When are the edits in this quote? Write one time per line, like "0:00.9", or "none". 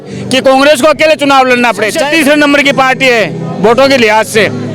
0:02.0